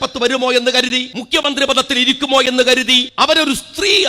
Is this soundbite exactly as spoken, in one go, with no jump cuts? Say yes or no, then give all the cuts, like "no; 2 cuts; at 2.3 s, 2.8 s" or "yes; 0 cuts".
no; 2 cuts; at 1.1 s, 3.1 s